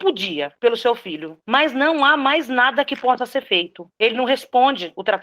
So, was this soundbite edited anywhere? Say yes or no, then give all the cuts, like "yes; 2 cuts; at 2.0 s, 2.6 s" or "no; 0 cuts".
yes; 1 cut; at 3.8 s